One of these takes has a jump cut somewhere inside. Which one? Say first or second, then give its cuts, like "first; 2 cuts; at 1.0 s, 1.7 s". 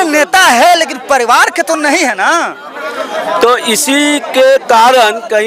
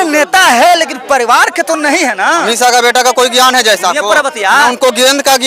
second; 1 cut; at 2.5 s